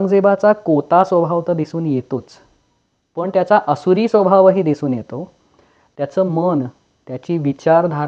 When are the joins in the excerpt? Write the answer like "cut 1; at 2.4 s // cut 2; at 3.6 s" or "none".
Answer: none

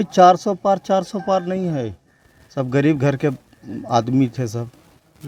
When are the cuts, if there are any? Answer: none

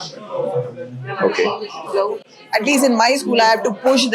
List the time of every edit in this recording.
none

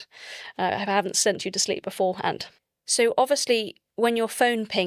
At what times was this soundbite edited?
cut 1; at 2.5 s

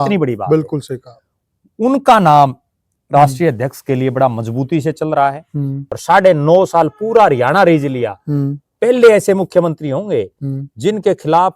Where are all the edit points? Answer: cut 1; at 5.9 s

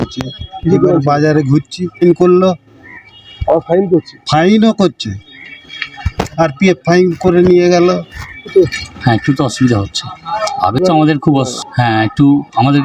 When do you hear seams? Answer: cut 1; at 2.0 s // cut 2; at 8.4 s // cut 3; at 10.3 s

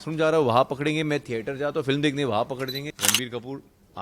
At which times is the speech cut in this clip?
cut 1; at 2.9 s

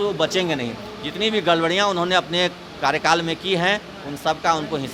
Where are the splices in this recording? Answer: none

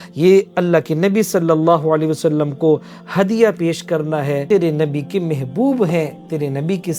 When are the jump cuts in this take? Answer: cut 1; at 4.4 s

